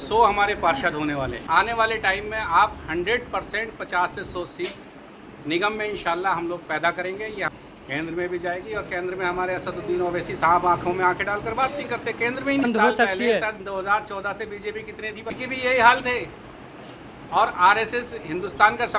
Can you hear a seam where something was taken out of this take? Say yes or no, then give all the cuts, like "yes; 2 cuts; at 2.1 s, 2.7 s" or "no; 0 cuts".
yes; 4 cuts; at 1.4 s, 7.5 s, 12.6 s, 15.4 s